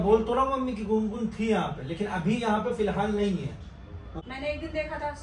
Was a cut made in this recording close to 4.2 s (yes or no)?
yes